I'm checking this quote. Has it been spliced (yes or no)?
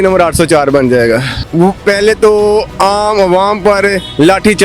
yes